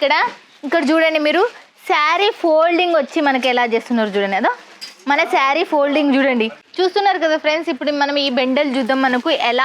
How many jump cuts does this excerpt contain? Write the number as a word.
one